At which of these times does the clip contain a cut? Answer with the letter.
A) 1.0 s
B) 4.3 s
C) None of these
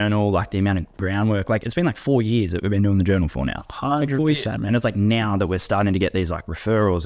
A